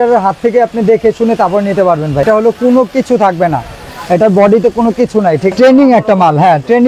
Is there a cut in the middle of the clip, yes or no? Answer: yes